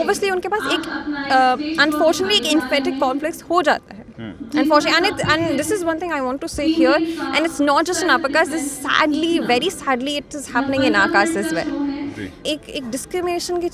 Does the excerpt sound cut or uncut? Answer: cut